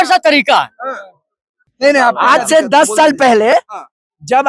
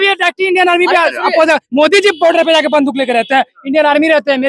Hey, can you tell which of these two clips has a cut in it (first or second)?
first